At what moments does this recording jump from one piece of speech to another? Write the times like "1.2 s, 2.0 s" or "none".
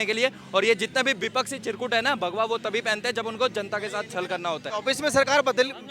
4.7 s